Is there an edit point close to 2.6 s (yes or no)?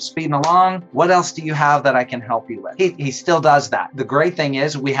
yes